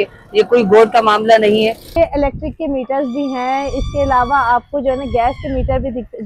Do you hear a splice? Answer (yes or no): yes